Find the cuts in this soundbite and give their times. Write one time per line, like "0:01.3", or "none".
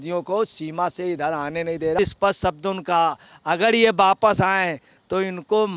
0:02.0